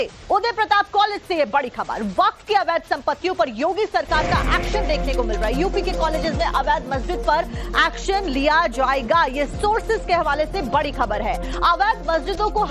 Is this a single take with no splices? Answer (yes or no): no